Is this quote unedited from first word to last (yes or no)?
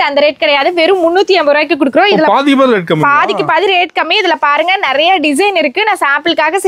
yes